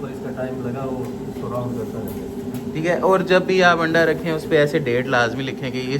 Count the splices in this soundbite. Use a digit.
0